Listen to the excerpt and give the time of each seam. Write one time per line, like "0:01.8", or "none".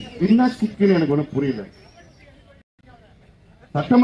0:02.2